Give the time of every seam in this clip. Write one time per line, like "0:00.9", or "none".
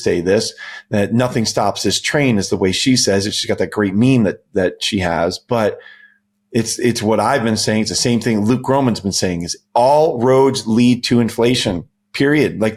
none